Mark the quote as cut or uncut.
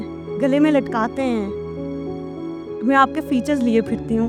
uncut